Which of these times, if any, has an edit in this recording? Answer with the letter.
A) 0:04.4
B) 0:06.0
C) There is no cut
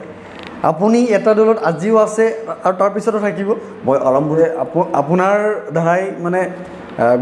A